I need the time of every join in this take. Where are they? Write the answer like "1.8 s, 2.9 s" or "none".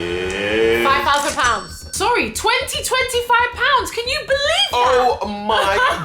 1.9 s